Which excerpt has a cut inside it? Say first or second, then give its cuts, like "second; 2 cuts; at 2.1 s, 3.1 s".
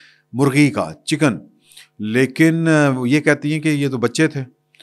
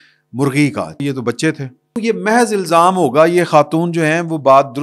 second; 2 cuts; at 1.0 s, 1.9 s